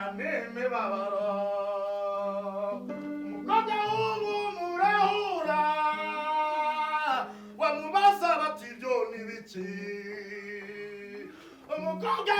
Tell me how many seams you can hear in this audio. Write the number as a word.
zero